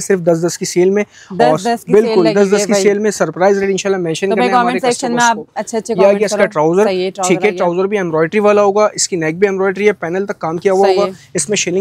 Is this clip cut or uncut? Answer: uncut